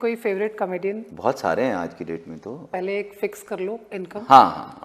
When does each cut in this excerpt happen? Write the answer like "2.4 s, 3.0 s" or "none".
1.1 s, 2.7 s